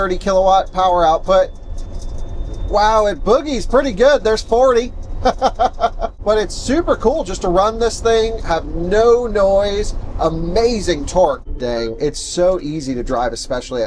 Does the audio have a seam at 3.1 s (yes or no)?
no